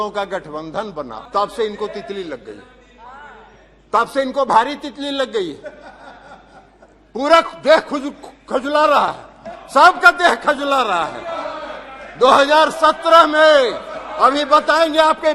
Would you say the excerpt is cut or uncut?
cut